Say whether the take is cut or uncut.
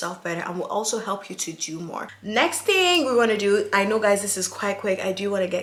uncut